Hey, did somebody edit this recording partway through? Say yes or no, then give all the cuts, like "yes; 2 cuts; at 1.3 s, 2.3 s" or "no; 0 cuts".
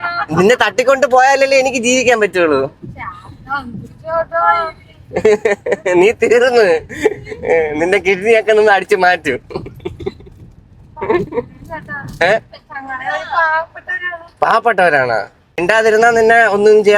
yes; 1 cut; at 15.6 s